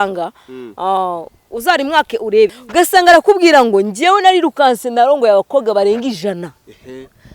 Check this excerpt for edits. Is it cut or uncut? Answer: cut